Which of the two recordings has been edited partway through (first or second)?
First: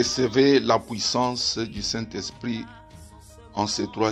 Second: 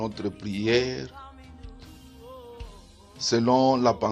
second